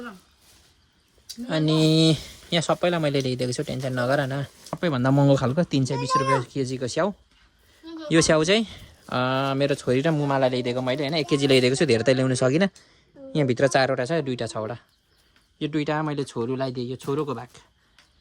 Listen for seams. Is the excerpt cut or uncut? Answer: cut